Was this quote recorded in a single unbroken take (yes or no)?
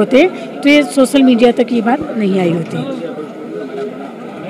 yes